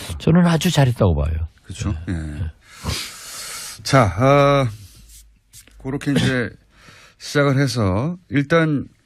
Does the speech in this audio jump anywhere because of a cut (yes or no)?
yes